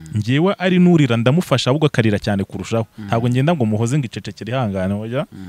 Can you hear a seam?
no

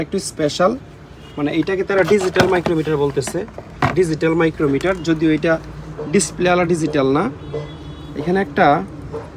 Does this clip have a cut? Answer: no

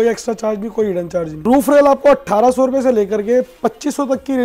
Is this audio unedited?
no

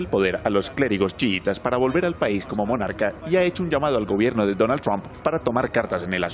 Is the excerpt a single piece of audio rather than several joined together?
yes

